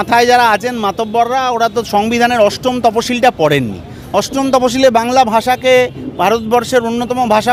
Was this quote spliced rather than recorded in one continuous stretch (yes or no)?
no